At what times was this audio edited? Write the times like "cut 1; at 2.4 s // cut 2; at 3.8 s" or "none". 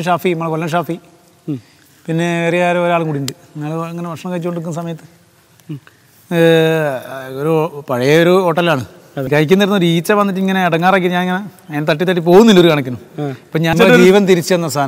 cut 1; at 9.3 s // cut 2; at 13.7 s